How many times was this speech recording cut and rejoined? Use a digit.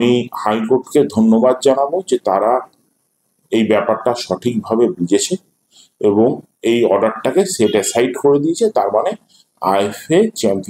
0